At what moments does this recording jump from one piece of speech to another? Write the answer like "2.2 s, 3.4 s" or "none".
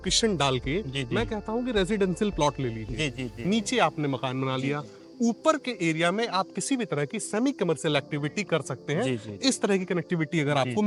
none